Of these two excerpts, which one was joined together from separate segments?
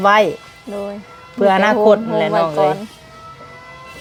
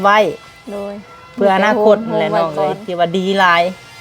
second; 1 cut; at 2.8 s

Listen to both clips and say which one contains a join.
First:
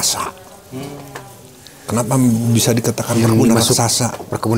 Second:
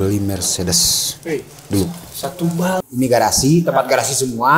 second; 1 cut; at 2.9 s

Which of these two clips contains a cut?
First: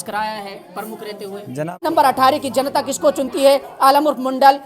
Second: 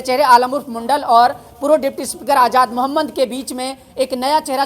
first; 1 cut; at 1.8 s

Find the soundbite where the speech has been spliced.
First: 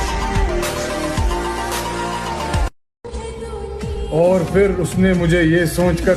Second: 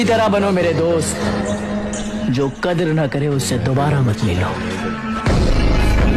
first; 1 cut; at 3.0 s

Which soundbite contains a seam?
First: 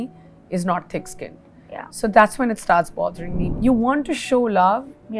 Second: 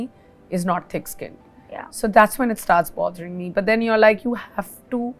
first; 1 cut; at 3.4 s

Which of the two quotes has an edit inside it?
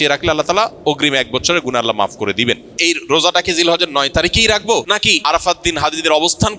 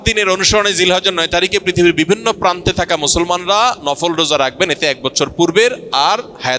first; 2 cuts; at 2.8 s, 5.2 s

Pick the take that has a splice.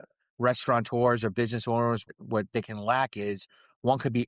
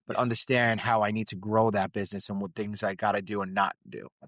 first; 1 cut; at 2.1 s

